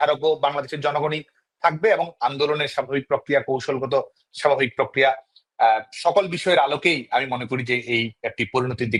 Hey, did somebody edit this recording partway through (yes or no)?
no